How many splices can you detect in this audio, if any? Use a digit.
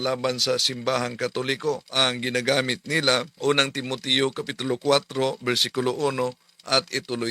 2